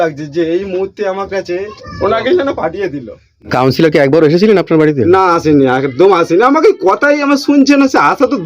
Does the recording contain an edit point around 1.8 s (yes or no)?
yes